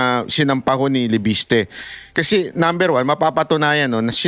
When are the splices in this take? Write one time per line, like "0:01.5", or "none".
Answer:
none